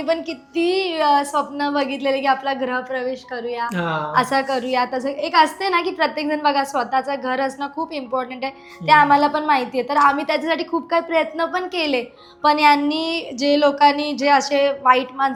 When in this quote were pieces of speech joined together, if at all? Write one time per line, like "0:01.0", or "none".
none